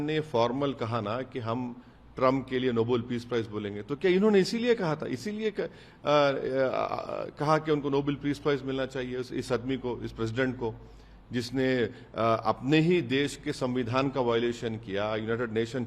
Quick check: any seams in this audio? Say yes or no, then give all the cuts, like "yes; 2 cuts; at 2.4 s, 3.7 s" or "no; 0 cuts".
no; 0 cuts